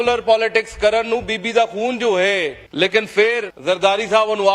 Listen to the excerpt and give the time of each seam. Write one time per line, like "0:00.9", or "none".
0:02.6
0:03.5